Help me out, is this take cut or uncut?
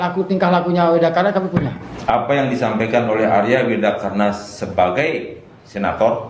cut